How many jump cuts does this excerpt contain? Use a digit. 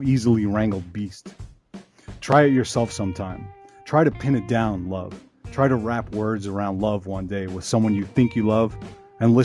1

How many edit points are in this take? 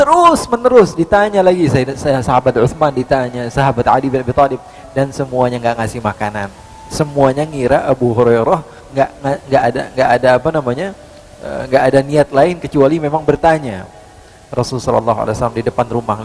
0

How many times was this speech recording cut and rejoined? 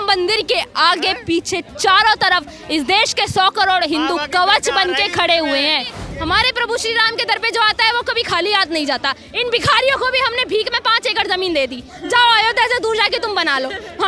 1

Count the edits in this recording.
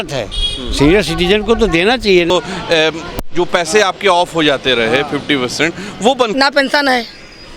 2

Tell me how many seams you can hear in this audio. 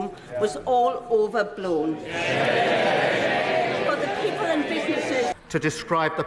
1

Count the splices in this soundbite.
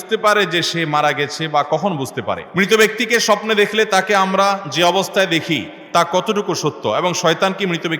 1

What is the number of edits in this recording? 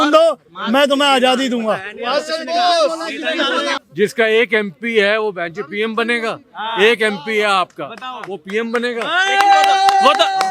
1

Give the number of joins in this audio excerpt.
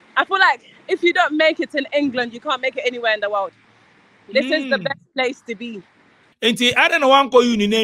1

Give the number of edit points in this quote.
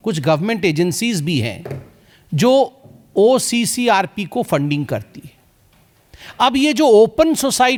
0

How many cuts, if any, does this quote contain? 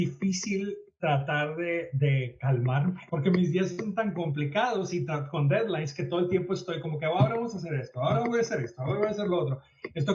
1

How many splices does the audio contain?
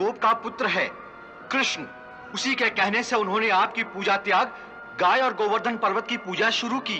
0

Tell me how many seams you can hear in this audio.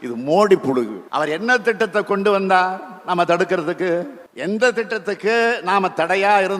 2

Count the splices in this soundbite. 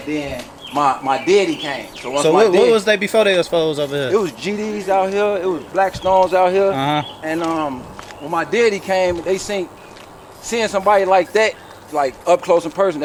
0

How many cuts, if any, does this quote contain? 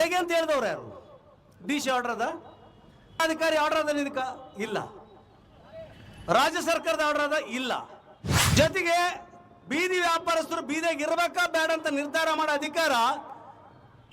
2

